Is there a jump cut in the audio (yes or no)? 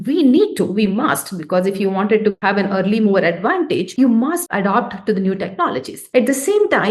no